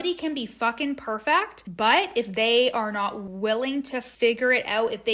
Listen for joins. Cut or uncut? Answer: cut